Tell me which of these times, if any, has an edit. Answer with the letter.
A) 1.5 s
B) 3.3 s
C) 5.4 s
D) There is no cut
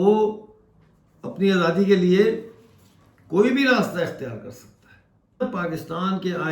C